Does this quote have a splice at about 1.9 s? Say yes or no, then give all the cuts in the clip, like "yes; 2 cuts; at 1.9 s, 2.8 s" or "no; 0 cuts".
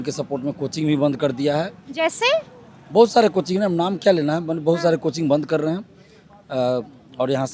no; 0 cuts